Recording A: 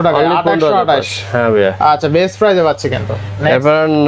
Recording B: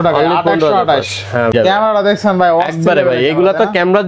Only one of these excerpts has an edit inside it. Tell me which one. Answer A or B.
B